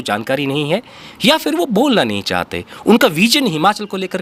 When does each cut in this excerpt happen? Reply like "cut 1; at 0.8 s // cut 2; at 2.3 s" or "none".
none

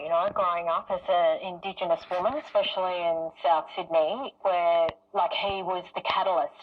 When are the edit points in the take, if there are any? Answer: cut 1; at 4.4 s

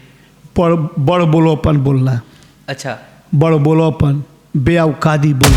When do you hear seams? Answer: none

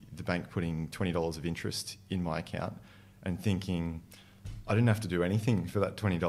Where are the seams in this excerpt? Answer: none

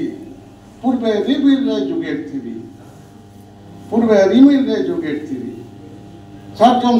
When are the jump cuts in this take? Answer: none

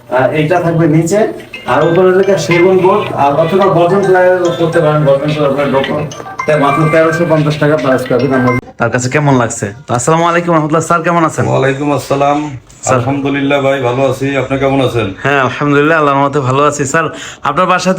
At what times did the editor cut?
cut 1; at 8.6 s

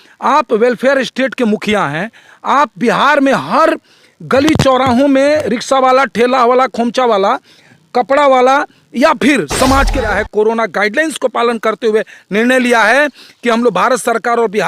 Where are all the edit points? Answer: cut 1; at 10.0 s

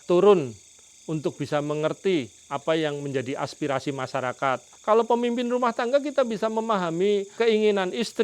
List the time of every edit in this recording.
cut 1; at 4.7 s

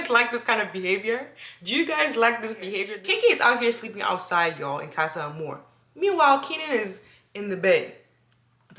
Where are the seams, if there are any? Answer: cut 1; at 2.9 s

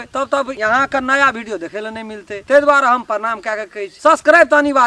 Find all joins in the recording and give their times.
none

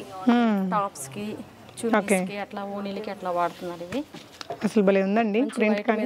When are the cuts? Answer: cut 1; at 4.1 s

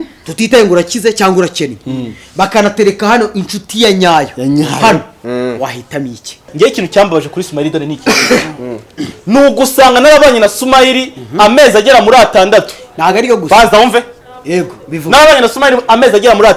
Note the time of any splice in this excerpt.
cut 1; at 6.5 s

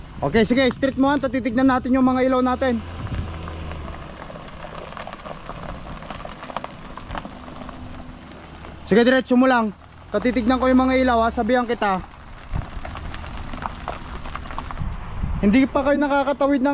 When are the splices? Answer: cut 1; at 14.8 s

